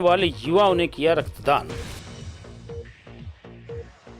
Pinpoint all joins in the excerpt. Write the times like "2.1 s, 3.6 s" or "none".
1.7 s